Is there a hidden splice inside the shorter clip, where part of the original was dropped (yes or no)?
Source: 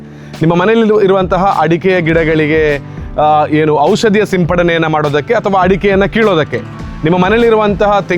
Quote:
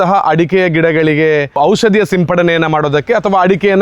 yes